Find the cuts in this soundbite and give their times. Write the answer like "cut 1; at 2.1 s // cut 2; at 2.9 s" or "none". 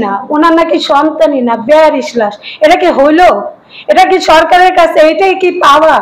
none

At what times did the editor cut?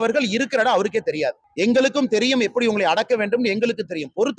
cut 1; at 1.4 s

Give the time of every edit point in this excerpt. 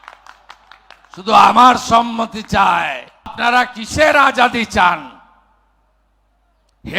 cut 1; at 3.4 s

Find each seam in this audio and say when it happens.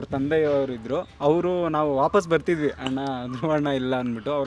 none

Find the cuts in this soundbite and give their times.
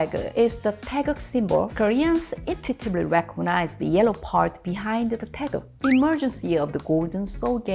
cut 1; at 1.7 s // cut 2; at 5.7 s

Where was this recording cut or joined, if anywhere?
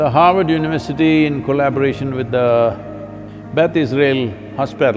none

